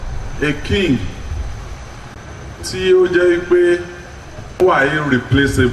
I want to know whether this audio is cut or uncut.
cut